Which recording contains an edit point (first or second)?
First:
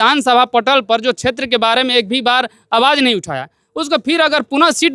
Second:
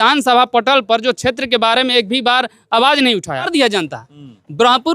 second